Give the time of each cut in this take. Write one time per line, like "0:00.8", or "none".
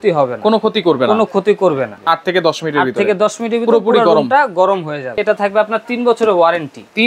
0:01.9
0:05.2